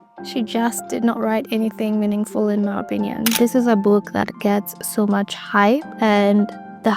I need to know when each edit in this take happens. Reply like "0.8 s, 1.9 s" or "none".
3.3 s